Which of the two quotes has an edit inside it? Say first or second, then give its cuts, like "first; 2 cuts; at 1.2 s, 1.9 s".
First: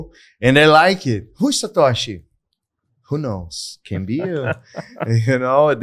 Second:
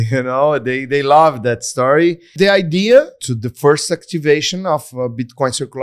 second; 2 cuts; at 2.3 s, 3.3 s